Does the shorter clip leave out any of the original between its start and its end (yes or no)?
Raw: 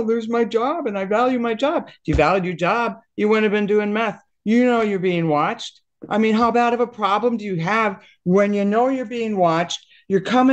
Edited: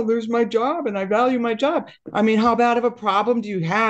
yes